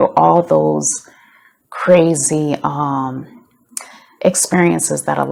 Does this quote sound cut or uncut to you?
uncut